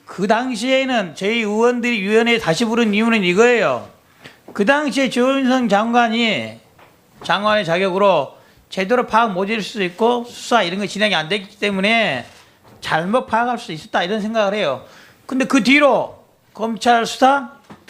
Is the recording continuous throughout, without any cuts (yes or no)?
no